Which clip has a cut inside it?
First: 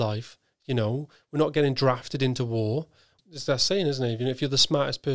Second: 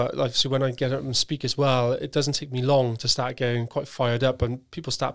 first; 1 cut; at 3.1 s

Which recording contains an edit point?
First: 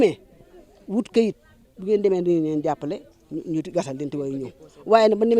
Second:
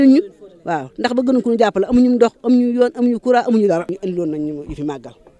second; 1 cut; at 3.9 s

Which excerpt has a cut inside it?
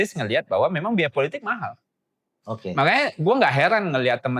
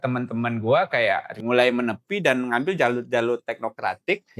second; 1 cut; at 1.3 s

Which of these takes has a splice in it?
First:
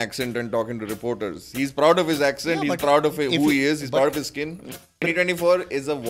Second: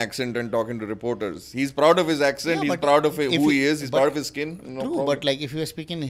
first; 1 cut; at 5.0 s

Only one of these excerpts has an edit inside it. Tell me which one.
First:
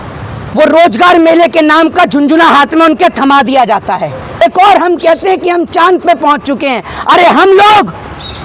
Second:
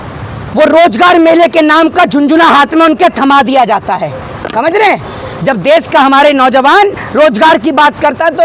first; 1 cut; at 4.3 s

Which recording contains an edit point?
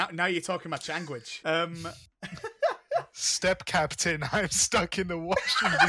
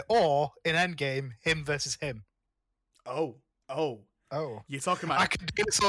first; 1 cut; at 1.3 s

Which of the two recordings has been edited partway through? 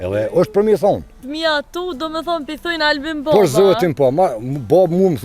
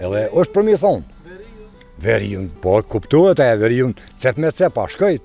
first; 1 cut; at 1.2 s

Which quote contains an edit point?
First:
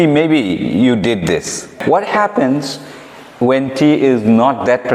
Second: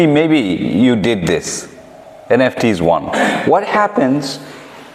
first; 1 cut; at 1.8 s

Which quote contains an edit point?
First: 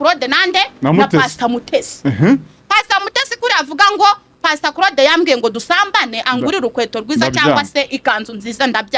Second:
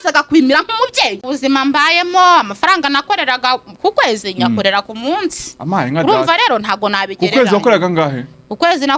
second; 1 cut; at 1.3 s

